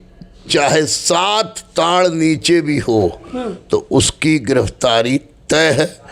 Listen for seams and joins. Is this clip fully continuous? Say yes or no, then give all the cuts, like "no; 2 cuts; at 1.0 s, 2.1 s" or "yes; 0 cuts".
yes; 0 cuts